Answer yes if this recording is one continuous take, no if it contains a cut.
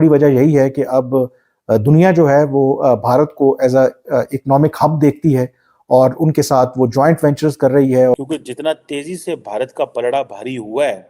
no